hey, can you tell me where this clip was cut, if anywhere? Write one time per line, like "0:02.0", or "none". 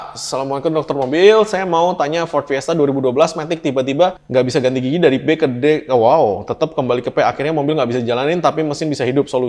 none